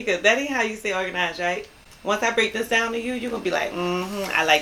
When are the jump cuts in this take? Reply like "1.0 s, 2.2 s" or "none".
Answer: none